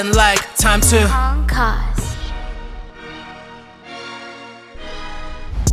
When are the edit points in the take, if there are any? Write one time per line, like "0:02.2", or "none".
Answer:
none